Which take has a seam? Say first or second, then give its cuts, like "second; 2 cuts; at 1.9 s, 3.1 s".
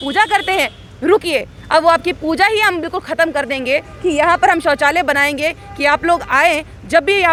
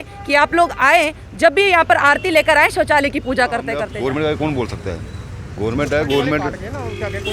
second; 1 cut; at 3.8 s